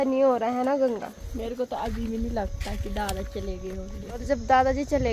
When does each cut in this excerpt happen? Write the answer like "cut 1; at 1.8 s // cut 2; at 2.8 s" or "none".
cut 1; at 1.2 s // cut 2; at 4.2 s